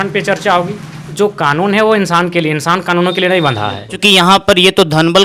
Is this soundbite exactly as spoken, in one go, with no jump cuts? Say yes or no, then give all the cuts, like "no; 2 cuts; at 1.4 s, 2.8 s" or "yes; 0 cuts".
no; 2 cuts; at 1.0 s, 4.0 s